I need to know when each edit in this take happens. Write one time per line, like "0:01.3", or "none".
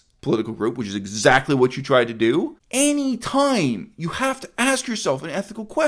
0:02.6